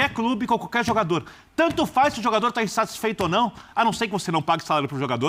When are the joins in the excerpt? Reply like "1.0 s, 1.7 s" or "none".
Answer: none

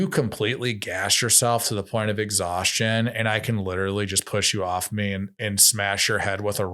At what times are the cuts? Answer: none

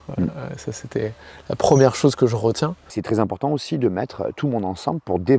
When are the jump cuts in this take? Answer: 2.9 s

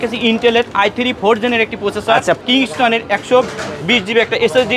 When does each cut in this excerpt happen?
2.4 s

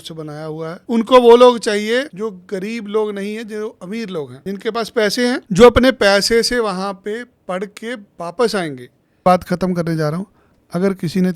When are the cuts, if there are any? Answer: 0.8 s, 2.1 s, 4.3 s, 5.4 s, 9.2 s

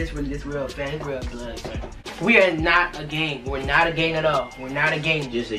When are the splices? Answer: 2.1 s

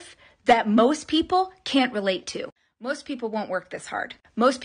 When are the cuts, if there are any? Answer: 2.4 s

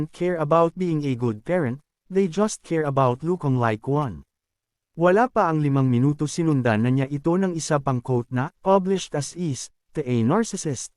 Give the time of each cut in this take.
4.8 s

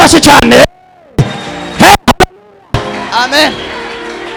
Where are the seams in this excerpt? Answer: none

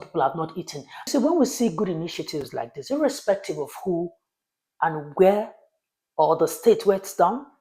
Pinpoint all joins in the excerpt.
1.1 s

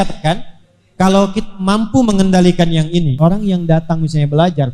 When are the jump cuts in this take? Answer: 3.1 s

